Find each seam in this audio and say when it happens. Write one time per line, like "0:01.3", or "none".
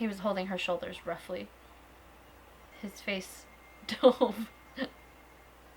0:02.7